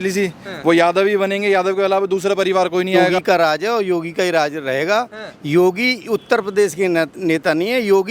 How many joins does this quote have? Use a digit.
1